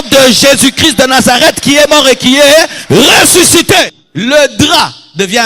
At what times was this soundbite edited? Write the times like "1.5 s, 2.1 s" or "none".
4.0 s